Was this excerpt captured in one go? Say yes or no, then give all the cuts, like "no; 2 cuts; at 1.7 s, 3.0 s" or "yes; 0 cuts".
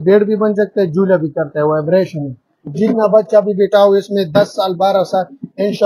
no; 1 cut; at 2.6 s